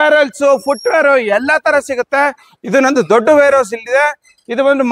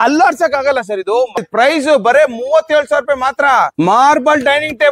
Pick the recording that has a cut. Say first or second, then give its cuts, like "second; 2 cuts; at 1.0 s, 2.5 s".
second; 2 cuts; at 1.4 s, 3.7 s